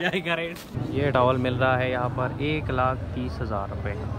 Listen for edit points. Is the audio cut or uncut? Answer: cut